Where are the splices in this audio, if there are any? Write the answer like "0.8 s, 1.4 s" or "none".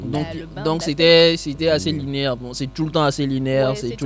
none

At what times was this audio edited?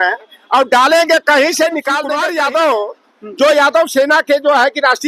2.1 s

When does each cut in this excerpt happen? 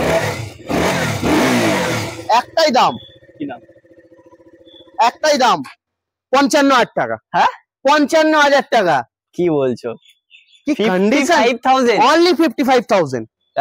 none

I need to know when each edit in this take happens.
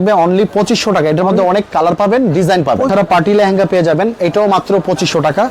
2.9 s

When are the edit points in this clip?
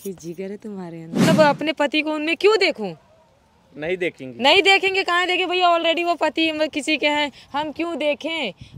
1.1 s

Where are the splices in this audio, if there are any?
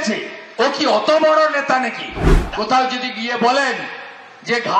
2.4 s

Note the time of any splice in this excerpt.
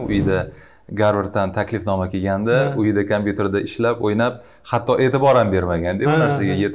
none

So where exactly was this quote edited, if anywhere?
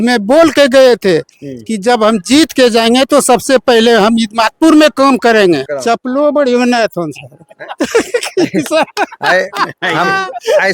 5.7 s

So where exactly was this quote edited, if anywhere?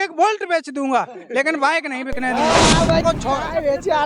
3.0 s

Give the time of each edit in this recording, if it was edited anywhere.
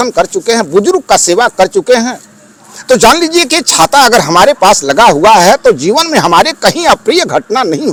none

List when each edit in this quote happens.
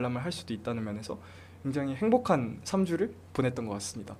none

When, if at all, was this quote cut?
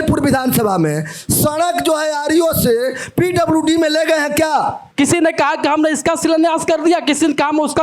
4.8 s

